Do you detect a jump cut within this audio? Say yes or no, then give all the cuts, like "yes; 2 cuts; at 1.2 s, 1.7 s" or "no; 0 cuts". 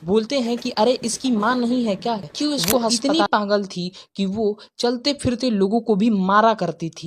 yes; 1 cut; at 2.9 s